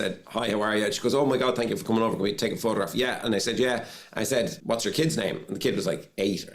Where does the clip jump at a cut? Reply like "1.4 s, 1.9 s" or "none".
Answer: 4.6 s